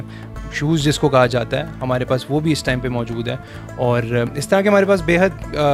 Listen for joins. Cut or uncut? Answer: uncut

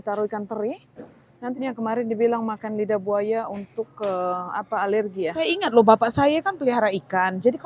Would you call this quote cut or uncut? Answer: cut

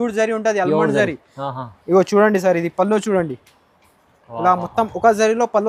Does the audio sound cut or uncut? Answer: uncut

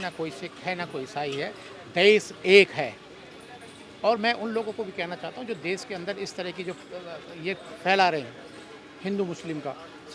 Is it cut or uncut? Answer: uncut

